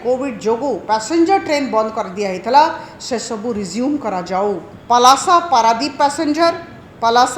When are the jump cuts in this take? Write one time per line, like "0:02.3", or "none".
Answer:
0:04.7